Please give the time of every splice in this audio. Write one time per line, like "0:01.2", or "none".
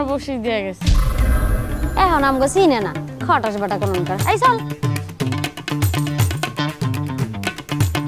0:04.6

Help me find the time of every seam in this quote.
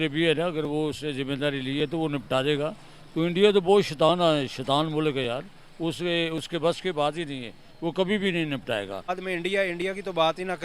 0:09.1

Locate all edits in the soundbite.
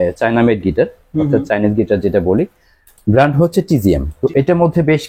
0:04.1

